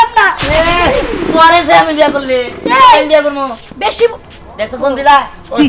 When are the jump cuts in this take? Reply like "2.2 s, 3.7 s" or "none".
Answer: none